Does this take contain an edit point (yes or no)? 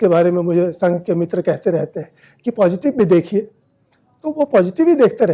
no